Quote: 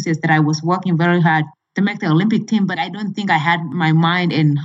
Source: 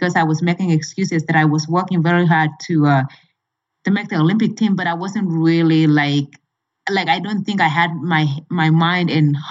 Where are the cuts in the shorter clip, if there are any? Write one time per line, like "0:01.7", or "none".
0:01.5
0:02.7
0:03.7

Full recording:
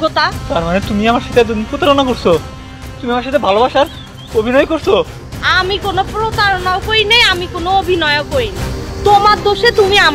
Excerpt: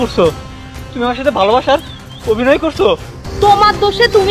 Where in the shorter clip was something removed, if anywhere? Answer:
0:03.2

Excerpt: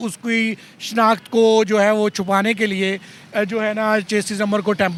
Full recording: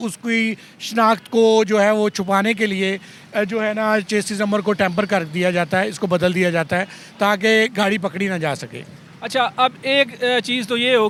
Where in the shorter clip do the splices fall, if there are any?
none

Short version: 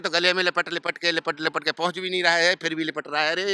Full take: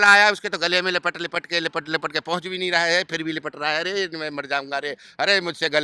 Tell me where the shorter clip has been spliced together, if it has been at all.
none

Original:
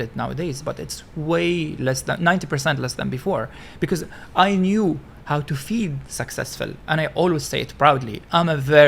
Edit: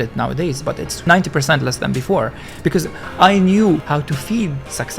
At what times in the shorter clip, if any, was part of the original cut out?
0:01.0
0:03.8

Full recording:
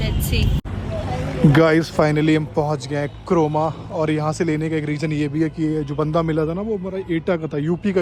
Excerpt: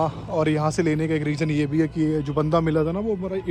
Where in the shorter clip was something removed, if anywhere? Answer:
none

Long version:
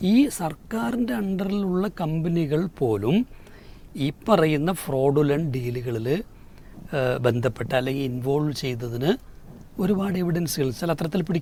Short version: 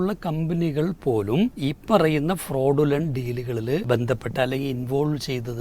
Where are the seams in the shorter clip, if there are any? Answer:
0:01.6
0:03.8

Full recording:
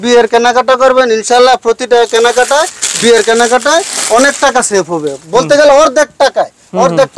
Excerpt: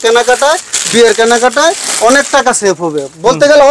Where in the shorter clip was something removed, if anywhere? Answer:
none

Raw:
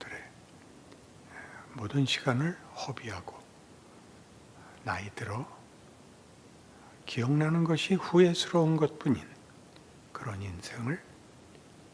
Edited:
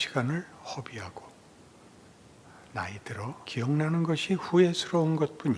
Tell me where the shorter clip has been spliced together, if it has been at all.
0:03.4

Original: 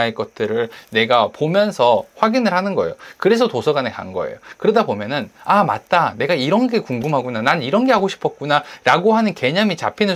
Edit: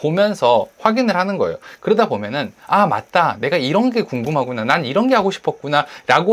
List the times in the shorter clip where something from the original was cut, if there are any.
0:01.7

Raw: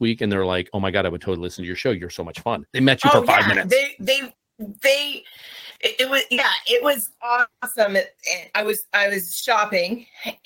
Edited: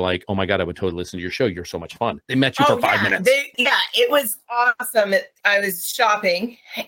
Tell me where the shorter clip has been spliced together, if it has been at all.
0:03.5
0:04.9

